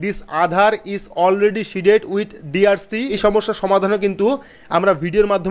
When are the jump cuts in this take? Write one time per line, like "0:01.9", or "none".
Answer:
0:03.1